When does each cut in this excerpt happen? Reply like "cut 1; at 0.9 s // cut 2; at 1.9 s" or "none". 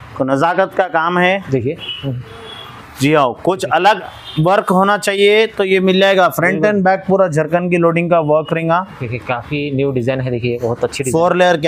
cut 1; at 2.8 s